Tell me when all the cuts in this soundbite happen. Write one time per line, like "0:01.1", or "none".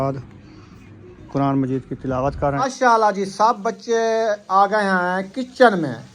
0:02.6